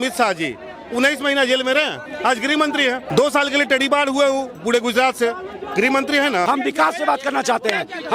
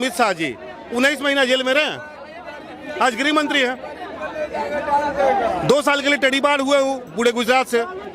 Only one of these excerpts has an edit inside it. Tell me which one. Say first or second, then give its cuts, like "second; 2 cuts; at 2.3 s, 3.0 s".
first; 3 cuts; at 2.0 s, 3.1 s, 6.5 s